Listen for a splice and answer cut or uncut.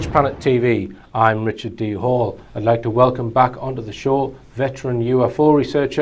uncut